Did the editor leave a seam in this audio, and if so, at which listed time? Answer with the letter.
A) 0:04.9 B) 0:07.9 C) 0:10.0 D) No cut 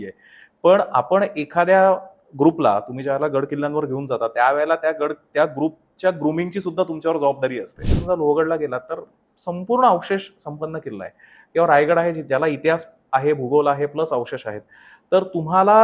B